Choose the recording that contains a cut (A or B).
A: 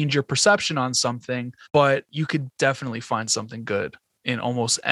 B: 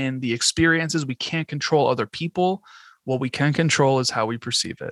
A